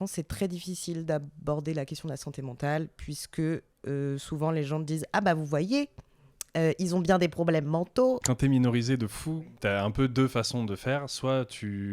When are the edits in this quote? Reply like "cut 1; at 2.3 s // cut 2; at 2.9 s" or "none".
cut 1; at 8.2 s // cut 2; at 9.4 s